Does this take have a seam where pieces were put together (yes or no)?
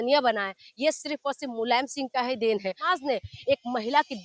yes